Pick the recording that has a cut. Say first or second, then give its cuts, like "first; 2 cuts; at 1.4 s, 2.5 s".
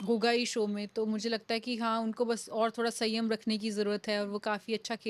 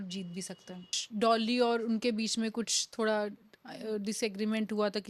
second; 1 cut; at 1.0 s